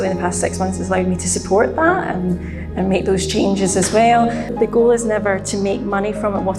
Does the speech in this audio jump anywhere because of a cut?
yes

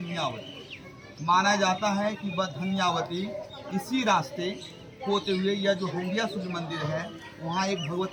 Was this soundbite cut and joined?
no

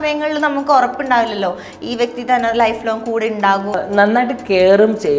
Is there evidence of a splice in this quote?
yes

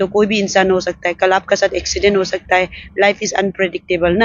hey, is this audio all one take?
yes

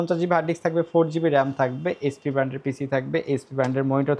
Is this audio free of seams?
yes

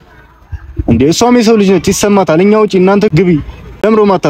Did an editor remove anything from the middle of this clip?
yes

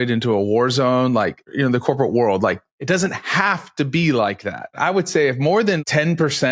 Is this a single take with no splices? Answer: no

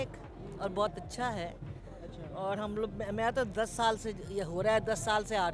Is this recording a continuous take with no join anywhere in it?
yes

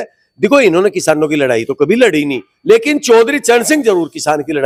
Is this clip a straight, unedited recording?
yes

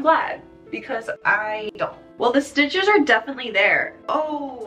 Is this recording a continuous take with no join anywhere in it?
no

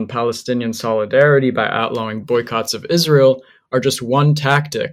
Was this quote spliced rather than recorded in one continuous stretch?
no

